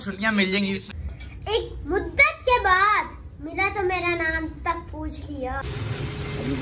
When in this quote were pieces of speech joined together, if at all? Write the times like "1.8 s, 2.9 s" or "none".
1.0 s, 5.6 s